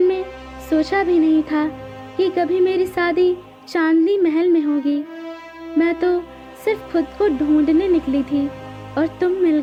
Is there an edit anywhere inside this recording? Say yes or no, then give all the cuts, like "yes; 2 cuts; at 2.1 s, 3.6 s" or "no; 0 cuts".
no; 0 cuts